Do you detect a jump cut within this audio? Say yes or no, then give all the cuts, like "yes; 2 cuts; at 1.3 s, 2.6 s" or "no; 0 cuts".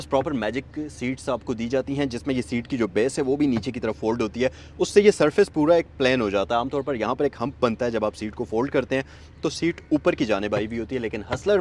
no; 0 cuts